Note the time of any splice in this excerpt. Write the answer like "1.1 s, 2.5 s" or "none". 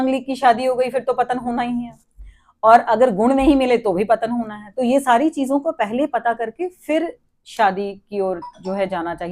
none